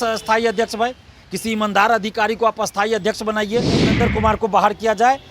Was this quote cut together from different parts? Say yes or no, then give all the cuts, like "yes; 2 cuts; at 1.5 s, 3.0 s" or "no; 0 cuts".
yes; 1 cut; at 3.9 s